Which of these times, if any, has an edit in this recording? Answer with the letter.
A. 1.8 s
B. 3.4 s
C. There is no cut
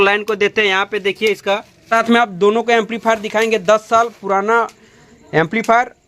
A